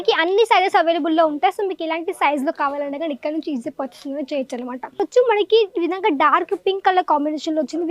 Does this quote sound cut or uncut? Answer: cut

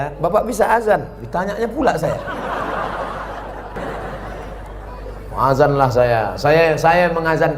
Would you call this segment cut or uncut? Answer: cut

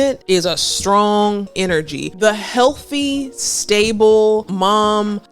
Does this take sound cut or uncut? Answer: cut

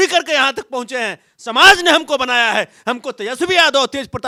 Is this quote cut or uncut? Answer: uncut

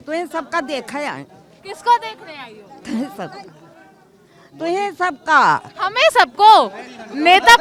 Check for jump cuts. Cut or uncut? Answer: uncut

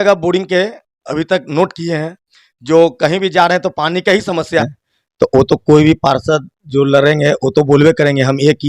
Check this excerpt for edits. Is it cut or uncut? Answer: cut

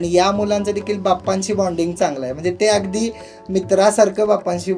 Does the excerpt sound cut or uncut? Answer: uncut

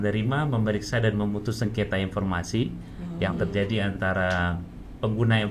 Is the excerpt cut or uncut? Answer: uncut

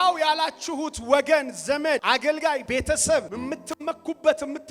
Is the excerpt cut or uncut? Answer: cut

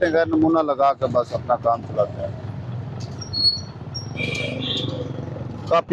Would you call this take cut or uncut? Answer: uncut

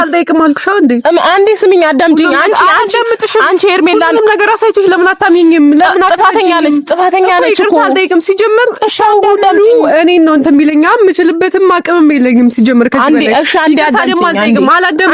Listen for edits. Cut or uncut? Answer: uncut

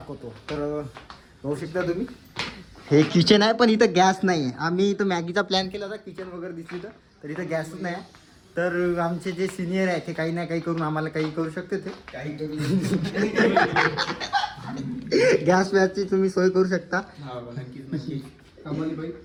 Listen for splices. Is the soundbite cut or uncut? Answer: uncut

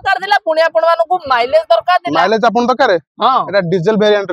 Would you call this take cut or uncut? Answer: uncut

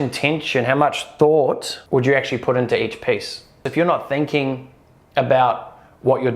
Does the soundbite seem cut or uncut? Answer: cut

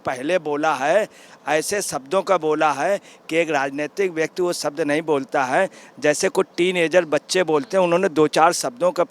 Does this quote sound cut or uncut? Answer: uncut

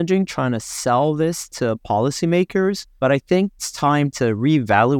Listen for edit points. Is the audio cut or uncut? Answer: cut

